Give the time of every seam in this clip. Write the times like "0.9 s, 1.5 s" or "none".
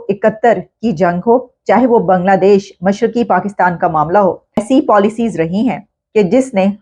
4.6 s